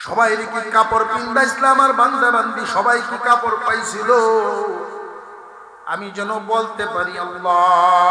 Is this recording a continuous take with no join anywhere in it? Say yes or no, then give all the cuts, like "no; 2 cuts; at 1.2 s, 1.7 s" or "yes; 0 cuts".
yes; 0 cuts